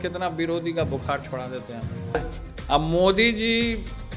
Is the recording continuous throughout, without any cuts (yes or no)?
no